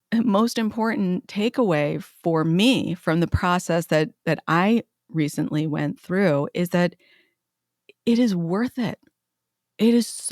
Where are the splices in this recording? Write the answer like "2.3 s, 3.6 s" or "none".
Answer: none

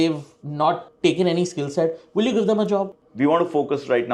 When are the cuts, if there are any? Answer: 2.9 s

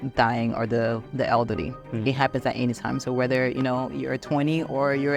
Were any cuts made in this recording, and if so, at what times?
none

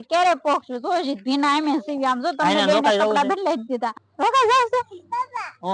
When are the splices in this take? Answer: 4.0 s

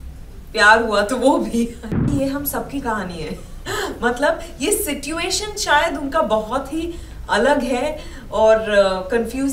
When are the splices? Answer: 1.9 s

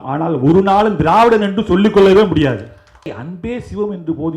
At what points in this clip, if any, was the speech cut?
3.2 s

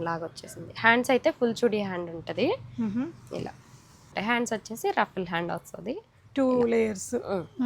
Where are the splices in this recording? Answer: 4.1 s

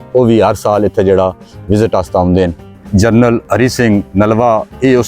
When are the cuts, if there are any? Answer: 2.7 s, 3.4 s

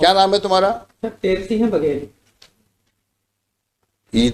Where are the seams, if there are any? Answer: none

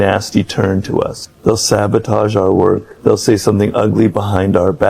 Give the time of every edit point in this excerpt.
1.2 s, 2.9 s

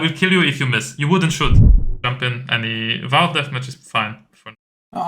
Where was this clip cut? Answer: 1.7 s

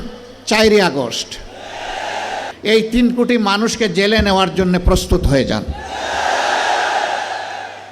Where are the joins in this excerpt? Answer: 2.5 s

